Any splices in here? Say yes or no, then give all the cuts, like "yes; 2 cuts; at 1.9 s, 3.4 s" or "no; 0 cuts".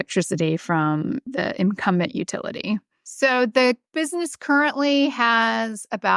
yes; 3 cuts; at 1.3 s, 3.0 s, 3.9 s